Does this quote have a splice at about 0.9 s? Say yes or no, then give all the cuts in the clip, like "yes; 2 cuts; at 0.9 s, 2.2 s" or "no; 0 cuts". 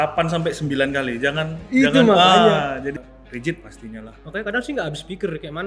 no; 1 cut; at 2.9 s